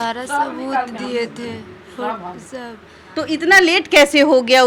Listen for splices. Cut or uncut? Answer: uncut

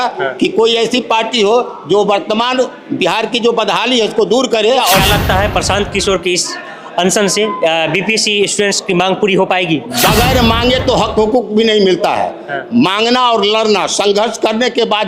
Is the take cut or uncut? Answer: cut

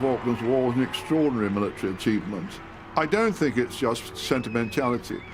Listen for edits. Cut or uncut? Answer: uncut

